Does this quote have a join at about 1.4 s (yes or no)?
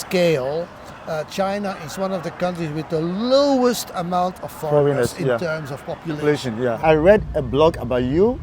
no